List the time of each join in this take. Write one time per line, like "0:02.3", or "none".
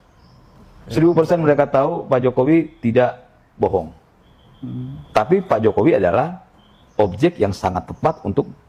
none

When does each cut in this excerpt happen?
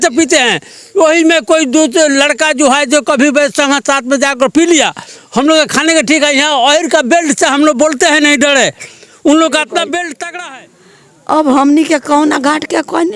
0:10.4

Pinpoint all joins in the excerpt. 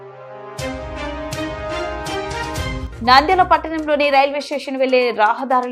0:02.8

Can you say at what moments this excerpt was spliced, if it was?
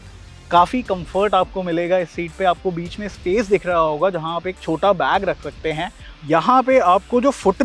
0:06.1

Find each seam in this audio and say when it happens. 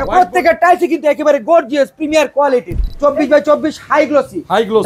0:02.6

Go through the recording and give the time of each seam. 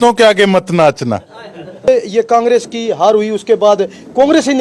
0:01.9

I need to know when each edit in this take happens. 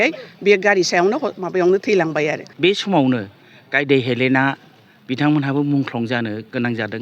0:02.4

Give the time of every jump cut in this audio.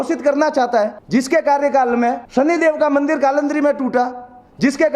0:01.0
0:02.2

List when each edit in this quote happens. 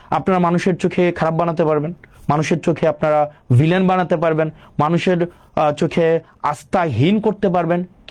none

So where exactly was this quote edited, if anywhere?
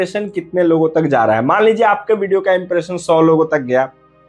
none

